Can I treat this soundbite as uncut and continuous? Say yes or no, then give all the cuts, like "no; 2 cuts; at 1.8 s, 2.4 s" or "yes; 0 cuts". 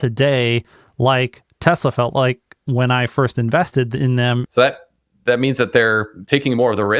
no; 1 cut; at 4.4 s